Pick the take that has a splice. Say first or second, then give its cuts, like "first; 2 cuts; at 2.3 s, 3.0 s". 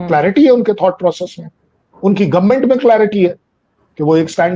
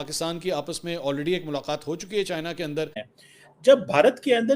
second; 1 cut; at 3.1 s